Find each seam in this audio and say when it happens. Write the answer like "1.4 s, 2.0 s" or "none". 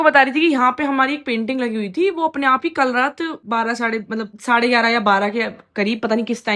none